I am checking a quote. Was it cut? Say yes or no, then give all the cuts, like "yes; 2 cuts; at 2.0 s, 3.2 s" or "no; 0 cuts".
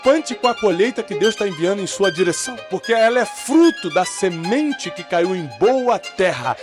yes; 1 cut; at 2.5 s